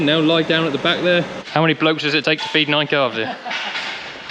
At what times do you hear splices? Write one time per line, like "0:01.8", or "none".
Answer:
0:01.4